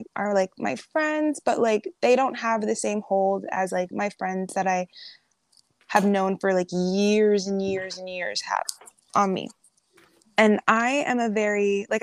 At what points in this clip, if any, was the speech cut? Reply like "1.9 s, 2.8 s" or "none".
10.2 s